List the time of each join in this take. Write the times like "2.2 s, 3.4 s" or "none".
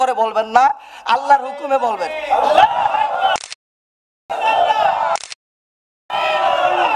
none

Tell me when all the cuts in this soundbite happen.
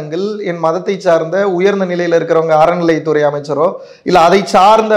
none

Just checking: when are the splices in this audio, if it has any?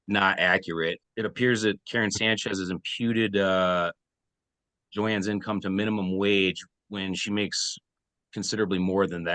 1.0 s

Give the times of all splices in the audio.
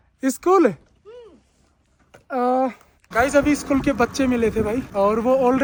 none

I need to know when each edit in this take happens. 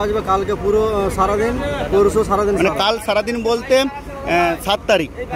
none

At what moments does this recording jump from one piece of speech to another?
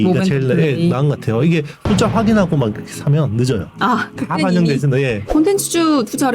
5.2 s

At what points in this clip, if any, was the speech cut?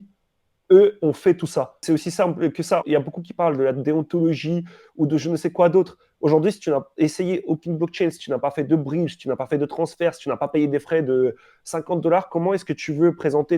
1.8 s, 2.8 s

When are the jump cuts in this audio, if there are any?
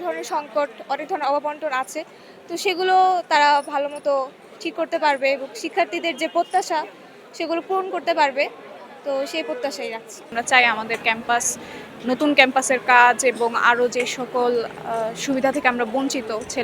10.3 s

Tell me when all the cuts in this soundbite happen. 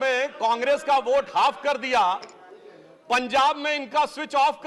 none

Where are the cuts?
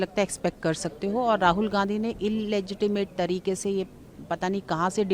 none

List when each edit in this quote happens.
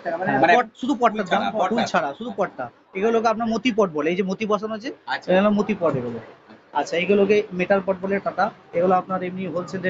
none

